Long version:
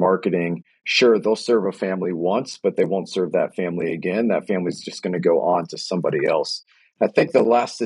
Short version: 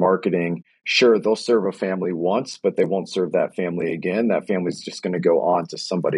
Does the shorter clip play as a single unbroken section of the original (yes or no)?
yes